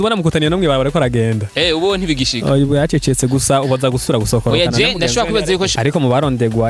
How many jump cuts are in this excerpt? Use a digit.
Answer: 1